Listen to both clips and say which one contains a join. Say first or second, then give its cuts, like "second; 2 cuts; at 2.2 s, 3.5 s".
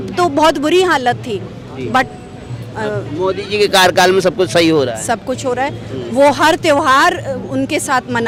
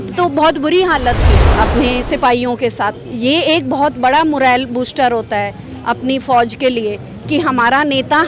second; 1 cut; at 1.4 s